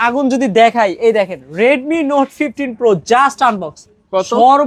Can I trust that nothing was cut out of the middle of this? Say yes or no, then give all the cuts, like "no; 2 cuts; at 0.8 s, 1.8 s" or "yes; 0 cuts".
yes; 0 cuts